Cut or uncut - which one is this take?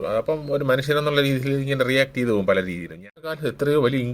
cut